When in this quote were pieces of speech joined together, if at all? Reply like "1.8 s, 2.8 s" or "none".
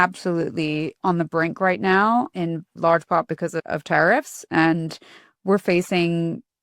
0.9 s, 2.7 s, 3.7 s